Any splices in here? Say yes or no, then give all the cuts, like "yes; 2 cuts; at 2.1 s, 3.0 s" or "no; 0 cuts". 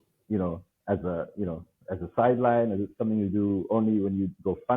no; 0 cuts